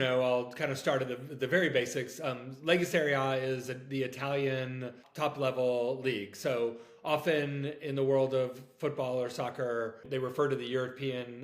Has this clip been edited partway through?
yes; 2 cuts; at 5.0 s, 10.0 s

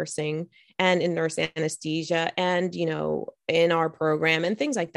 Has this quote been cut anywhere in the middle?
no; 0 cuts

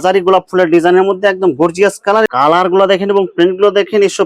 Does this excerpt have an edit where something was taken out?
yes; 1 cut; at 2.3 s

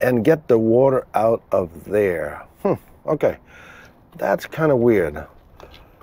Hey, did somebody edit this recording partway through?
no; 0 cuts

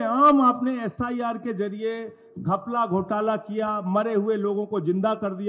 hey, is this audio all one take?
yes; 0 cuts

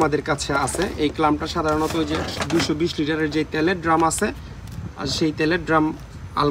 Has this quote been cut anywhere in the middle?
no; 0 cuts

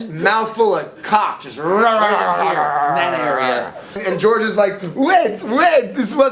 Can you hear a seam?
yes; 1 cut; at 4.0 s

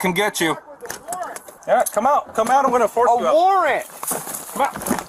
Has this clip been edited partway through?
yes; 1 cut; at 1.5 s

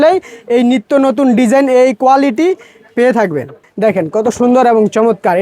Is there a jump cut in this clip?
yes; 1 cut; at 3.6 s

